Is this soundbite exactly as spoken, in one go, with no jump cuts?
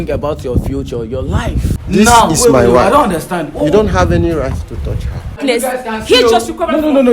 no; 2 cuts; at 1.8 s, 5.4 s

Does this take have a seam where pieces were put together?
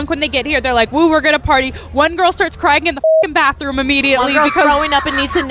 no; 0 cuts

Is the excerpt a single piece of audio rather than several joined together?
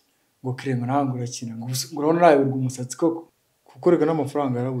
no; 1 cut; at 3.2 s

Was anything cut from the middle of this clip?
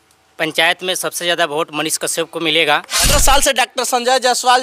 yes; 1 cut; at 3.1 s

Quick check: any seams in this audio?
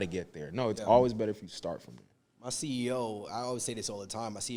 no; 0 cuts

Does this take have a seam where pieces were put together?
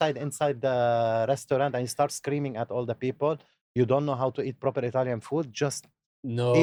no; 0 cuts

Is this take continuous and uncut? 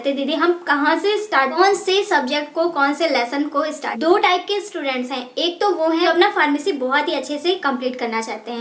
no; 3 cuts; at 1.5 s, 3.9 s, 6.1 s

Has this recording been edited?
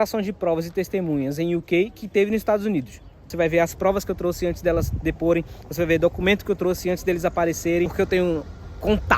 yes; 2 cuts; at 3.3 s, 7.9 s

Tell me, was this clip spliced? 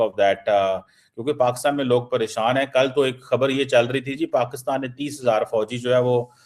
no; 0 cuts

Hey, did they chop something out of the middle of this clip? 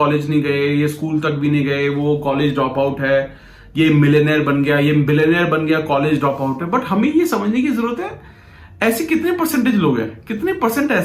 no; 0 cuts

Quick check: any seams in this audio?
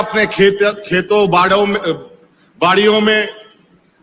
no; 0 cuts

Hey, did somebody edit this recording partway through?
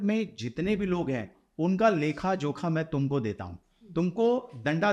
no; 0 cuts

